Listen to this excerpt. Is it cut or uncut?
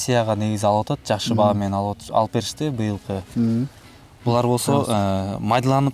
cut